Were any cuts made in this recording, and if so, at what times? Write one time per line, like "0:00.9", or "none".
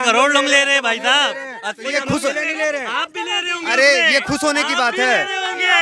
none